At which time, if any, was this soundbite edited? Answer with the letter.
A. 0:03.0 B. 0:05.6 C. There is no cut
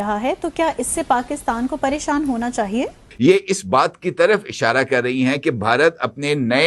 A